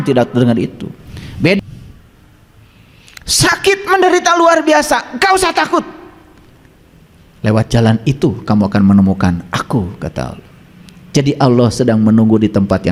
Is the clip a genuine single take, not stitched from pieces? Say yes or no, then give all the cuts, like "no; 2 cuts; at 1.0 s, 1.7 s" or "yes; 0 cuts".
no; 1 cut; at 1.6 s